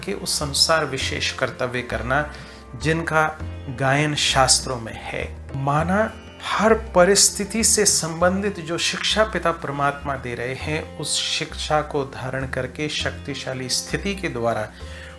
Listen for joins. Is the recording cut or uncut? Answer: uncut